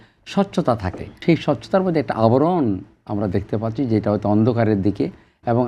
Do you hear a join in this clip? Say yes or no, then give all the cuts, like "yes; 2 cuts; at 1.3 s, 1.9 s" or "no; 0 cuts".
yes; 1 cut; at 1.2 s